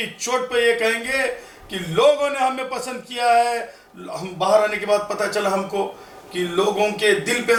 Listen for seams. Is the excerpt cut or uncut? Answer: uncut